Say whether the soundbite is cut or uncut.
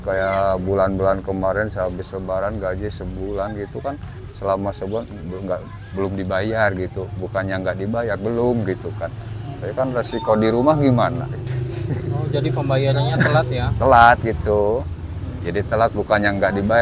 uncut